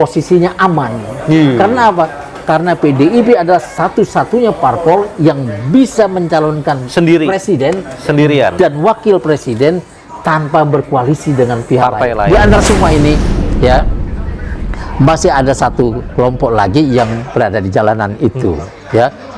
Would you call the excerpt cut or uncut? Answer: cut